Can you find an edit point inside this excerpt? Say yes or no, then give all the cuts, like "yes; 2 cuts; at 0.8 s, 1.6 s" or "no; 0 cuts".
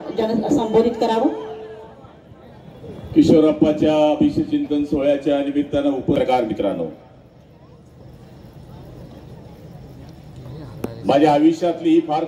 yes; 1 cut; at 6.1 s